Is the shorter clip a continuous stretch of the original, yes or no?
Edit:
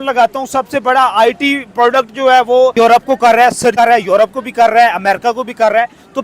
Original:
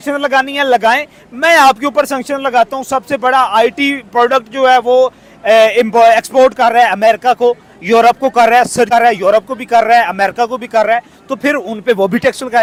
no